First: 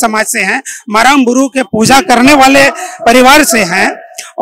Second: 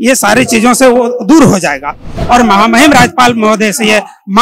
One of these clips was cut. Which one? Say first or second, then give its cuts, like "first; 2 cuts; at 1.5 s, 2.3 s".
second; 1 cut; at 2.1 s